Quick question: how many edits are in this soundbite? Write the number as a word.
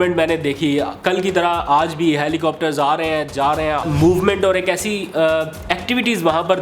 one